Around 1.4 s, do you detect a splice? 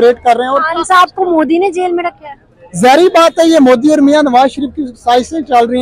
no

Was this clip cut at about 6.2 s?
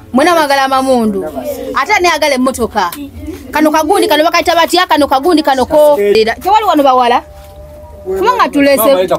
yes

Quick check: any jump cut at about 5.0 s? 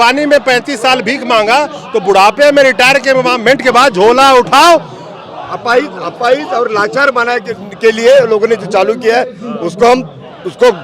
no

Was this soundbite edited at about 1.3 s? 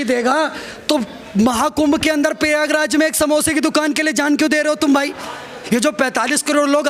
no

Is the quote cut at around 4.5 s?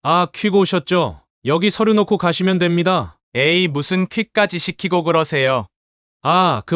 no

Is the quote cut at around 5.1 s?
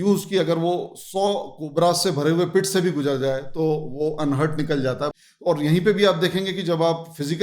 yes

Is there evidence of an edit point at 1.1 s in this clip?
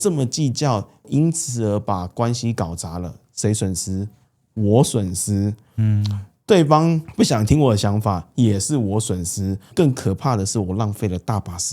yes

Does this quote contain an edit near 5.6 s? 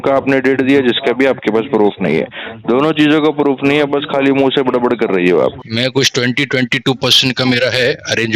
yes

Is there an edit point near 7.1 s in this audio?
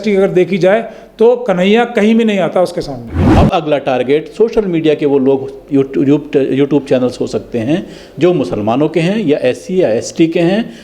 no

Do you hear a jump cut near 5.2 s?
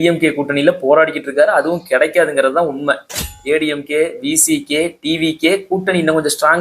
no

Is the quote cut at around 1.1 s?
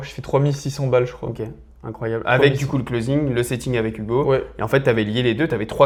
no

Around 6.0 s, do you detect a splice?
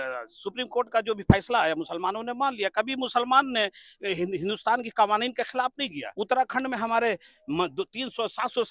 yes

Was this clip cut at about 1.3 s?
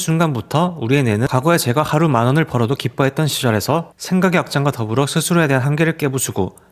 yes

